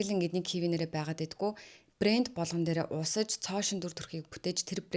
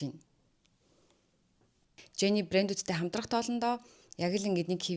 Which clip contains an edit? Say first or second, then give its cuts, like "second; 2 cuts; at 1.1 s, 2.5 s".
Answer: second; 1 cut; at 1.9 s